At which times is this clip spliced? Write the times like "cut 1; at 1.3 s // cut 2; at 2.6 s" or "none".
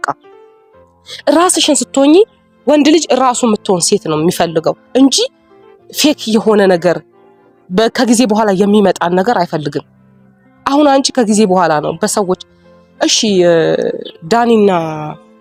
none